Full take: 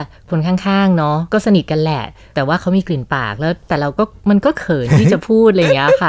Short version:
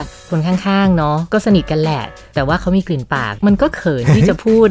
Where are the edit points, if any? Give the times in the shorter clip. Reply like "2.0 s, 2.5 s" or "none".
3.3 s